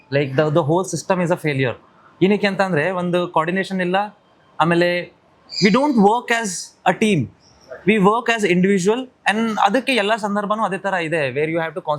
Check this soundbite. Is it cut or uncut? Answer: uncut